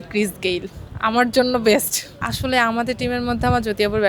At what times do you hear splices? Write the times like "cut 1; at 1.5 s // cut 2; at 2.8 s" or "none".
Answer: cut 1; at 2.2 s